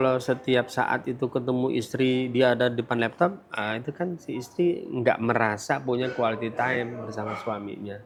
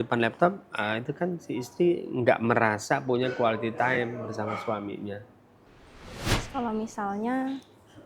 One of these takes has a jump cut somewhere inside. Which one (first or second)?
second